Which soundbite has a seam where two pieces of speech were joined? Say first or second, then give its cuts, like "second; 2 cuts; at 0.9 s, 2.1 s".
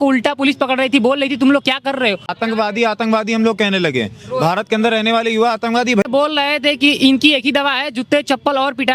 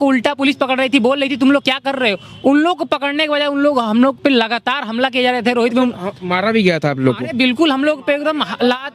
first; 2 cuts; at 2.4 s, 6.0 s